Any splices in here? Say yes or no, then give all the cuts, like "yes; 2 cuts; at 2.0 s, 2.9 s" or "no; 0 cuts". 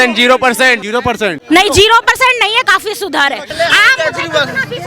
yes; 2 cuts; at 1.4 s, 3.5 s